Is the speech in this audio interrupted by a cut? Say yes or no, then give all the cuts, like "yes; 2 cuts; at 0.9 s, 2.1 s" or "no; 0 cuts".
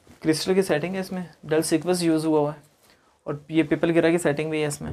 no; 0 cuts